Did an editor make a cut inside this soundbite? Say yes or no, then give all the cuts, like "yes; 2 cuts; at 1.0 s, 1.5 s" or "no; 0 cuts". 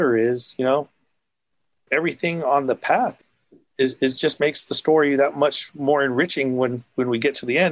yes; 2 cuts; at 1.8 s, 3.1 s